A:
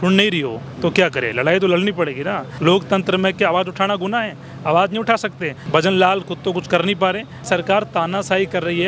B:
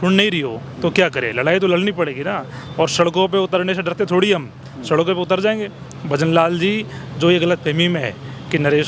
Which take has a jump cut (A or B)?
A